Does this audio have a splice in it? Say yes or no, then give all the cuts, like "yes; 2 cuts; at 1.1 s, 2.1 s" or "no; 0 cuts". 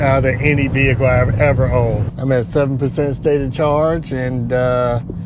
yes; 1 cut; at 2.1 s